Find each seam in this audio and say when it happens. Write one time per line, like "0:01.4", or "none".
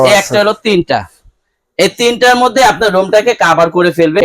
none